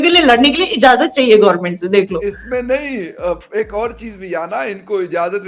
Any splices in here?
no; 0 cuts

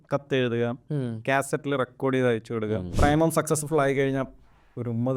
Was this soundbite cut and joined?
yes; 1 cut; at 2.9 s

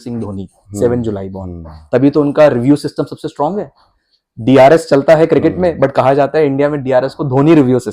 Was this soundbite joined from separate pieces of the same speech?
no; 0 cuts

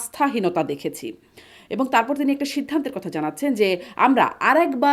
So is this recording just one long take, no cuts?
yes; 0 cuts

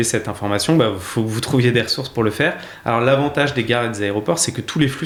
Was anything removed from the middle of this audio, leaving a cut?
no; 0 cuts

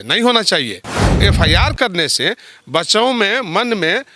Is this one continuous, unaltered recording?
no; 1 cut; at 1.1 s

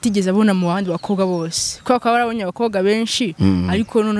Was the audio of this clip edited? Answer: no; 0 cuts

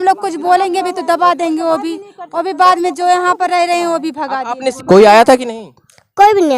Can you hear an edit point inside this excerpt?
yes; 1 cut; at 4.8 s

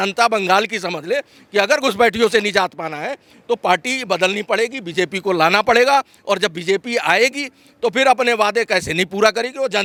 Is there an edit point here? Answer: no; 0 cuts

